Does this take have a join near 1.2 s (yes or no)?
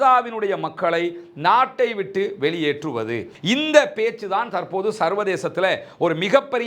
no